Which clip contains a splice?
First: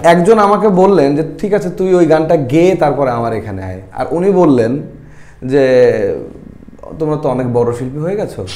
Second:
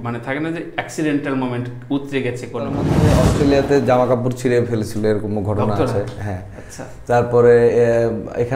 second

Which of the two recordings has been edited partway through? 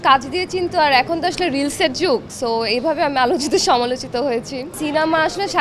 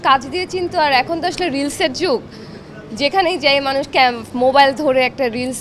first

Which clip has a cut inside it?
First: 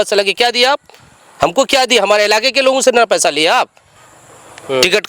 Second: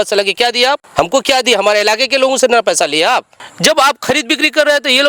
second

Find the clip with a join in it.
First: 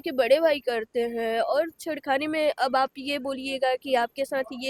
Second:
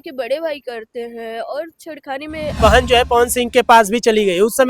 second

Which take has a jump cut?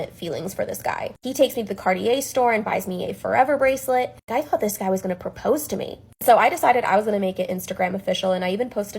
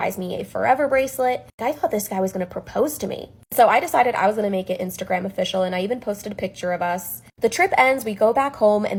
first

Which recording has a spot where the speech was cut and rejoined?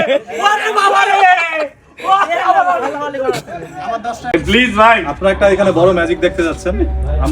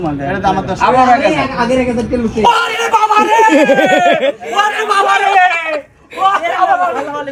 first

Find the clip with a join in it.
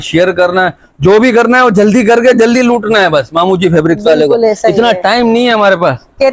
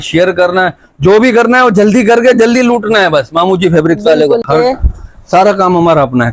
second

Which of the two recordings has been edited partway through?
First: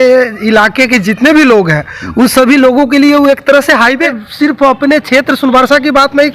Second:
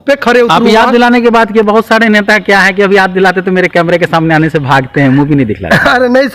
first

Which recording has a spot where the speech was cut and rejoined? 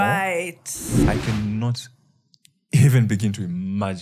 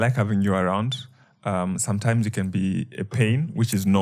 first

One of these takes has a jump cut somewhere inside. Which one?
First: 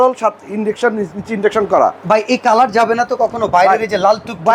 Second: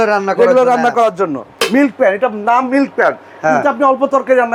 second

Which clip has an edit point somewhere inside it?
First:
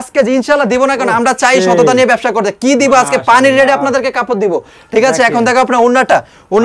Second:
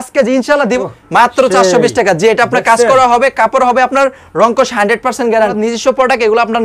second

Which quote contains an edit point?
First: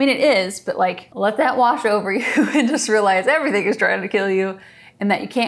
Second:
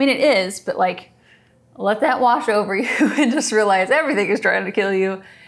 first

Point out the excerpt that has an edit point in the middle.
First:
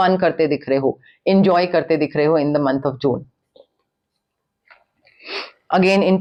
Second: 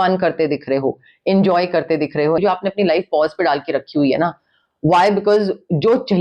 second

